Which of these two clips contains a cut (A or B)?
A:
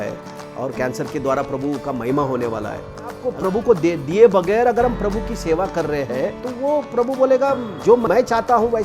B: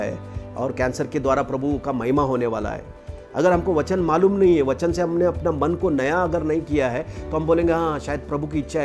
A